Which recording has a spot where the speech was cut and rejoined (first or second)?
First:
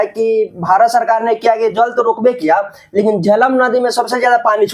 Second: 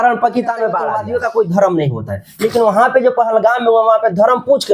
second